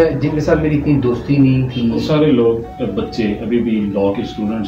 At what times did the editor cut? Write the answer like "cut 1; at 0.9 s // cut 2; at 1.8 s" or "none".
cut 1; at 2.0 s